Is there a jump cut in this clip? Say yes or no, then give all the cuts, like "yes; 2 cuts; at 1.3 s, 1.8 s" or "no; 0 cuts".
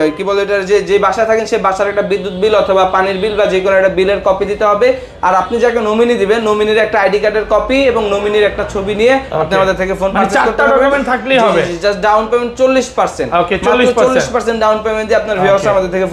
no; 0 cuts